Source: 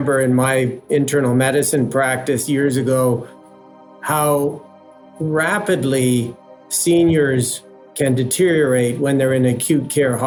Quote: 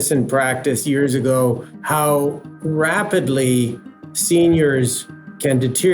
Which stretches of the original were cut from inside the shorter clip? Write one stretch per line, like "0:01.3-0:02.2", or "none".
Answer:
0:03.3-0:03.9
0:04.7-0:05.1